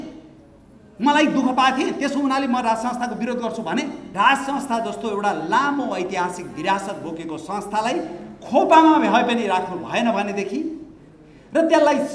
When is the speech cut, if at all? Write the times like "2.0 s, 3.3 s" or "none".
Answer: 4.0 s